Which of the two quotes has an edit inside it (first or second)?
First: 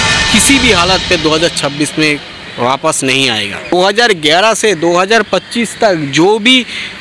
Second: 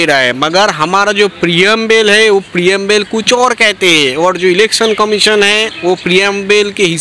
first